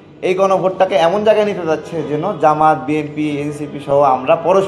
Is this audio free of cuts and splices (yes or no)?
yes